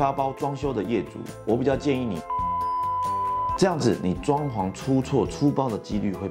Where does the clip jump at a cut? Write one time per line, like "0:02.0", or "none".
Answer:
none